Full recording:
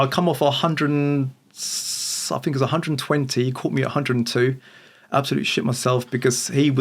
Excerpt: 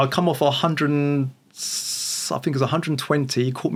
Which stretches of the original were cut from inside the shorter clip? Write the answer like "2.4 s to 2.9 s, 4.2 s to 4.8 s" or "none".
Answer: none